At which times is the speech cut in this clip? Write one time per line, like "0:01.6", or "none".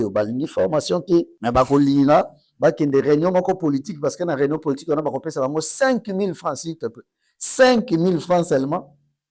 0:01.3